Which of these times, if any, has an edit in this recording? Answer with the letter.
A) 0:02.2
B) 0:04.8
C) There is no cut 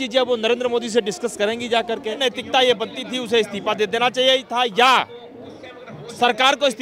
A